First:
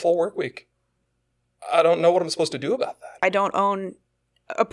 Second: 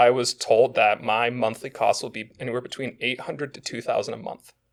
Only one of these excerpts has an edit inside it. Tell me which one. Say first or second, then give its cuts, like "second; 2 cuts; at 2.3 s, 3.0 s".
first; 1 cut; at 3.1 s